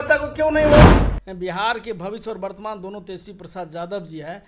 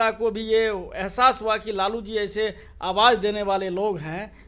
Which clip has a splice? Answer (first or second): first